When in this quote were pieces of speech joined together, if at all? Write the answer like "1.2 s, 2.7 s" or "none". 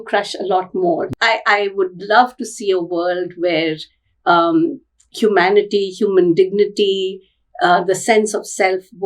1.1 s